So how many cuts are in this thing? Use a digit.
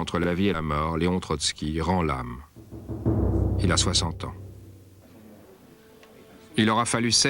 1